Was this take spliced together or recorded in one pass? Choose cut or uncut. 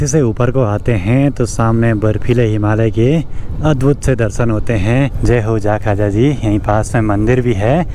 uncut